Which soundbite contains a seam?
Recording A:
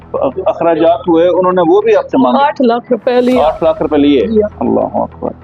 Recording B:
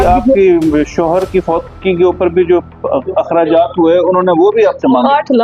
A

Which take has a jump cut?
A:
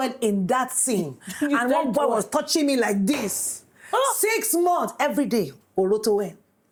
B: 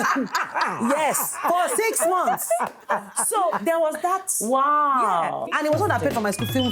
B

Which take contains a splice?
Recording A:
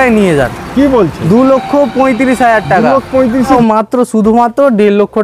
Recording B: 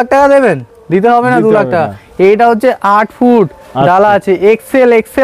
A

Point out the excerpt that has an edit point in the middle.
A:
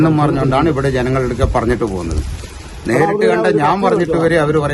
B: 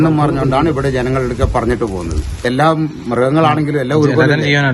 B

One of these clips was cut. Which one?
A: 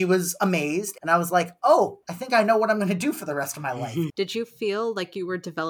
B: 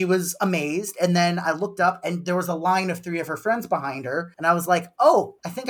A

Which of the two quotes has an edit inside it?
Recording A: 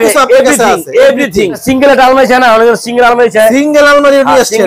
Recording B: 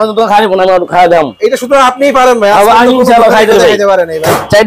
A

